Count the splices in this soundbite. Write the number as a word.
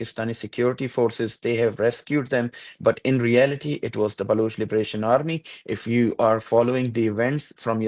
zero